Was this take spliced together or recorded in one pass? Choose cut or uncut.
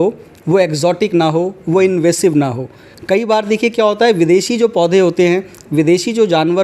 uncut